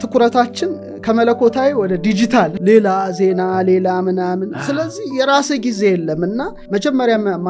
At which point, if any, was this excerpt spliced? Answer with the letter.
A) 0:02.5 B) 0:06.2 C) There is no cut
A